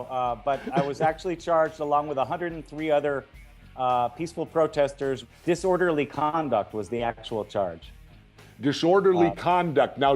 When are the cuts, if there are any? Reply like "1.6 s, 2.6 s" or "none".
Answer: 0.9 s